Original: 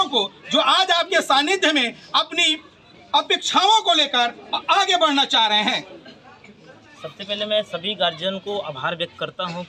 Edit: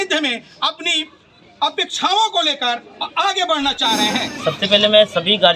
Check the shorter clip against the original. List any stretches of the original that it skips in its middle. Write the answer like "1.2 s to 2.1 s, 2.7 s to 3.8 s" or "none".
5.8 s to 6.9 s